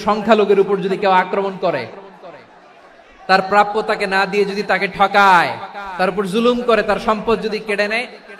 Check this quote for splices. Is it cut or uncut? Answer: uncut